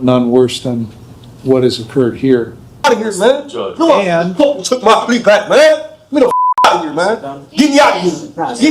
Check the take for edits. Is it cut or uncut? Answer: cut